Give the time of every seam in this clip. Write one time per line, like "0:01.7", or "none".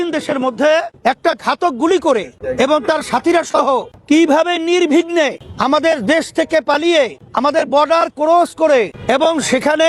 0:00.9
0:02.4
0:03.9
0:05.5
0:07.2
0:09.0